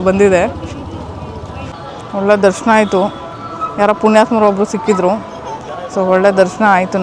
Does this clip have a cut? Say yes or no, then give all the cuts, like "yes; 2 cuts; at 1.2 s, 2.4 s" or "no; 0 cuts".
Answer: yes; 1 cut; at 1.7 s